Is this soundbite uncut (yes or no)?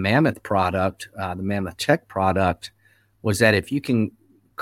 yes